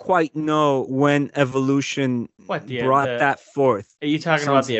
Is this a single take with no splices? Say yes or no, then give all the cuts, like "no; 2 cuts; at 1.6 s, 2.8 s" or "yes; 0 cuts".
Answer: no; 3 cuts; at 0.9 s, 2.4 s, 3.9 s